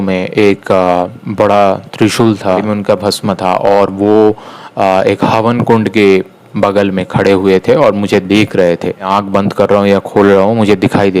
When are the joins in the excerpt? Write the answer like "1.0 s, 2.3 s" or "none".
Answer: 2.6 s, 9.1 s